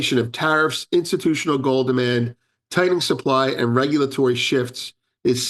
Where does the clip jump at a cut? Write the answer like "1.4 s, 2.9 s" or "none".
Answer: none